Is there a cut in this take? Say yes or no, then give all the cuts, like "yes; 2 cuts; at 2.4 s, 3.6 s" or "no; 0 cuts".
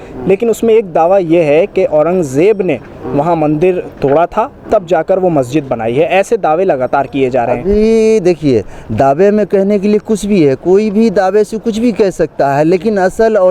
no; 0 cuts